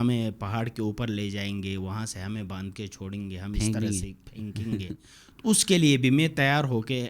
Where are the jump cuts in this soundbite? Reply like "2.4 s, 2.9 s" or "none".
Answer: none